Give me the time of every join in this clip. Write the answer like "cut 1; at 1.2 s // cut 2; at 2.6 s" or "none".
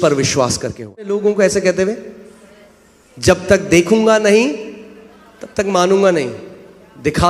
cut 1; at 1.2 s